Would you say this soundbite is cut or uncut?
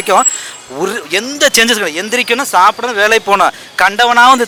uncut